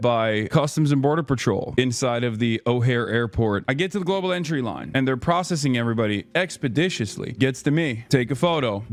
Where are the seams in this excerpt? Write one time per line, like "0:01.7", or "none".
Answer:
none